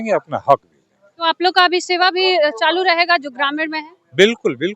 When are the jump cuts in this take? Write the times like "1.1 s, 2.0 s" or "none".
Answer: none